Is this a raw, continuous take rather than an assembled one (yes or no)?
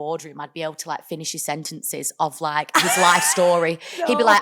yes